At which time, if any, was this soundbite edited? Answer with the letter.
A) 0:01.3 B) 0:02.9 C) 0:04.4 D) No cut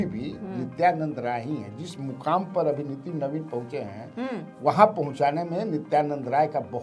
D